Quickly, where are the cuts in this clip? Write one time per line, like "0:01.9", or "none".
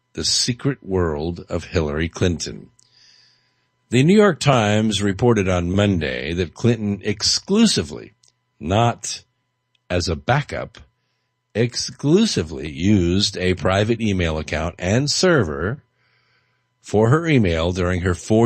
0:10.4